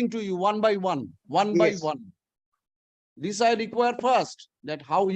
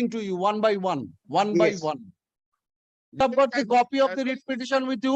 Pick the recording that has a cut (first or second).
second